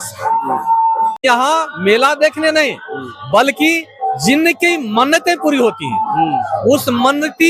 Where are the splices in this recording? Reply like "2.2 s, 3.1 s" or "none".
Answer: 1.2 s